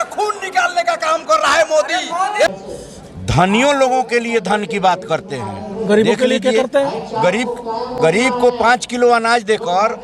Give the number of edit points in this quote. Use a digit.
1